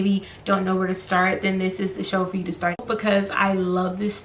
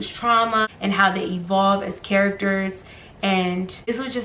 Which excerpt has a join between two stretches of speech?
first; 1 cut; at 2.8 s

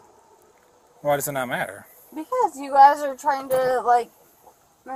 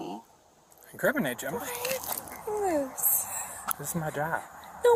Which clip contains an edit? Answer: second; 1 cut; at 1.4 s

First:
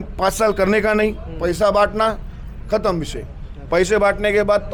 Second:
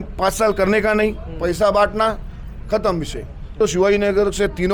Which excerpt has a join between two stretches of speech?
second; 1 cut; at 3.6 s

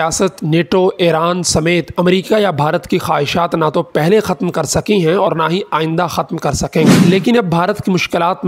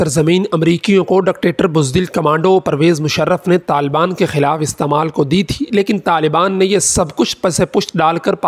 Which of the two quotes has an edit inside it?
first; 1 cut; at 7.0 s

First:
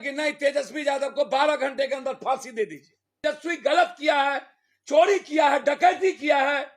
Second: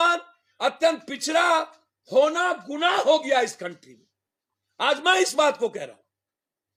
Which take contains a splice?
first; 1 cut; at 3.2 s

